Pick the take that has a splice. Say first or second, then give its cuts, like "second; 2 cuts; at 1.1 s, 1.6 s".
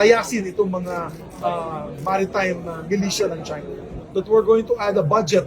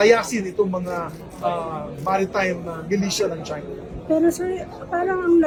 first; 1 cut; at 3.9 s